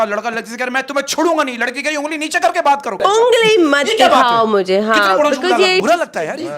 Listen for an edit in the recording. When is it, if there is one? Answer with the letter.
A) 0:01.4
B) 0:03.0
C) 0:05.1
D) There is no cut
B